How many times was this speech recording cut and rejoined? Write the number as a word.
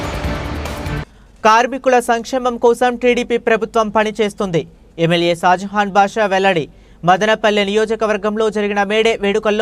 one